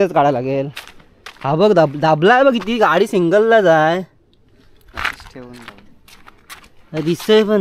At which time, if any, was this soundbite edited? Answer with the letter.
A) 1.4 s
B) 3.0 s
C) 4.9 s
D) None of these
D